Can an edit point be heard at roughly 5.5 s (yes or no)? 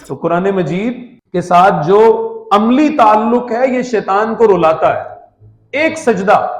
no